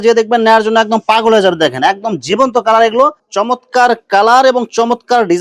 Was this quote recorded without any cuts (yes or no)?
no